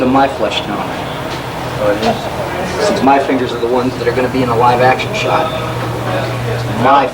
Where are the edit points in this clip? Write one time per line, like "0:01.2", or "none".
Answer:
0:01.7

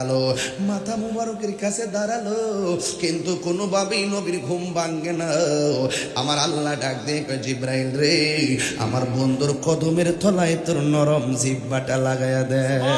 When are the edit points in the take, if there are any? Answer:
none

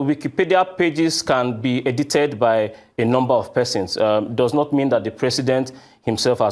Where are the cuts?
none

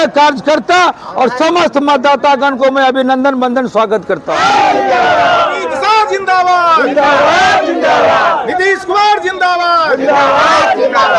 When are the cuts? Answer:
none

